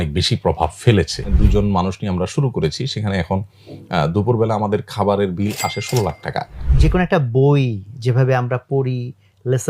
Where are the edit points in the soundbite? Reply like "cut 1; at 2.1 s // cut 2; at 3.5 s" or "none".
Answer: cut 1; at 1.3 s // cut 2; at 6.7 s

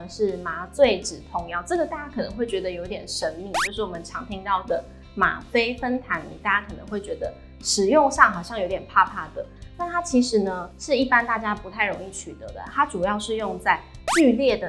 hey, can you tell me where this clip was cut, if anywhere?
none

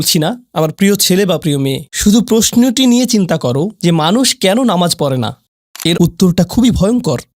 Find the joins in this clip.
cut 1; at 6.0 s

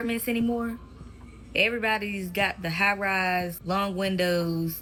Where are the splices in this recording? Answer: none

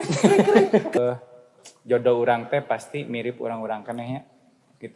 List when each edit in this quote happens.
cut 1; at 1.0 s

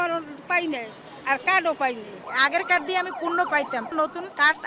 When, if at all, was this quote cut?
cut 1; at 2.2 s // cut 2; at 3.9 s

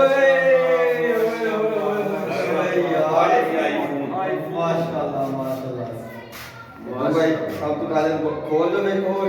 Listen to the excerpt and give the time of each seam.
none

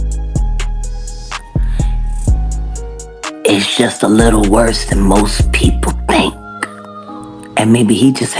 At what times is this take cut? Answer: cut 1; at 3.4 s

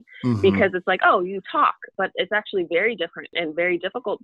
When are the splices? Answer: cut 1; at 1.9 s // cut 2; at 3.3 s

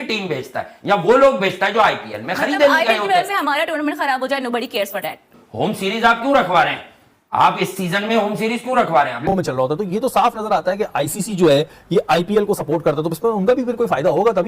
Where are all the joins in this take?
cut 1; at 9.3 s

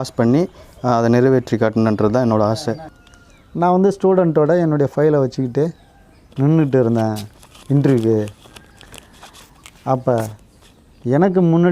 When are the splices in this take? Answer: cut 1; at 2.8 s

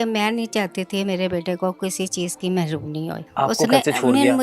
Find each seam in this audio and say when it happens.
cut 1; at 3.2 s

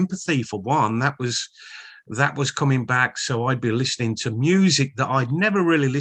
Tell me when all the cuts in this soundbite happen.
none

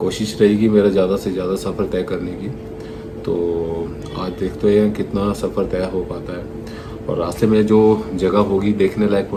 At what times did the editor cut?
none

